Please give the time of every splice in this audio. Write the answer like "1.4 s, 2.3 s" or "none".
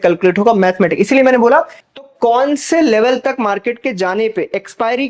1.8 s